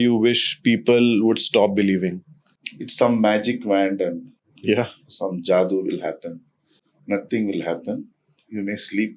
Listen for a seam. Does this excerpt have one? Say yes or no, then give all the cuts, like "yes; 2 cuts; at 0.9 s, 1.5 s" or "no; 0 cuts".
no; 0 cuts